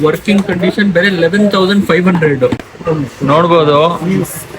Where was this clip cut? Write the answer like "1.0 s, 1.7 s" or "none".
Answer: 2.7 s